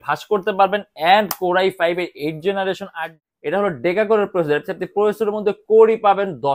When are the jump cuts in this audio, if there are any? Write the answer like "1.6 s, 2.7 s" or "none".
2.9 s